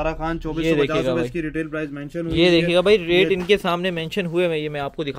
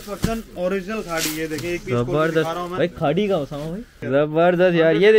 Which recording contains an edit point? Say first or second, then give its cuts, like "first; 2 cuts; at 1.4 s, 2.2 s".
second; 1 cut; at 3.9 s